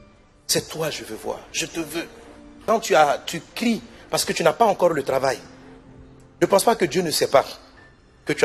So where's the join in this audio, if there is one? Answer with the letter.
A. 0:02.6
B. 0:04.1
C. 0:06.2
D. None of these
A